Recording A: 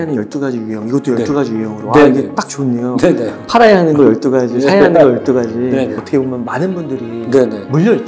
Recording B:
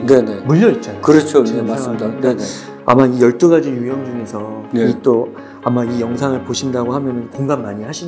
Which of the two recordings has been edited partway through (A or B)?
A